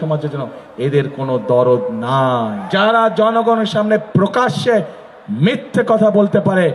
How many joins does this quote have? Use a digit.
1